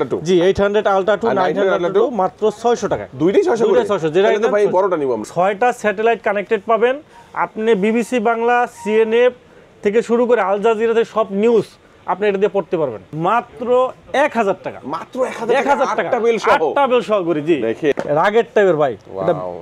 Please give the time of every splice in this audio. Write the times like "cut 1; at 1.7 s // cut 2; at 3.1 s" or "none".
cut 1; at 5.2 s // cut 2; at 13.0 s // cut 3; at 17.9 s